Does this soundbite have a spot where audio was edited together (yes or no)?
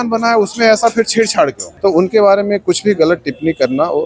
yes